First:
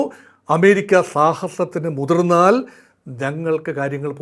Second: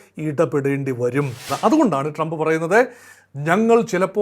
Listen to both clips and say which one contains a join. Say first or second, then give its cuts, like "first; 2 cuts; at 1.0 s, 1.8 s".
second; 1 cut; at 1.5 s